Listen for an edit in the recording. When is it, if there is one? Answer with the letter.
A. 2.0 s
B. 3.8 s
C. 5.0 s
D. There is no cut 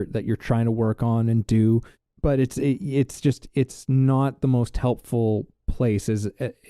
A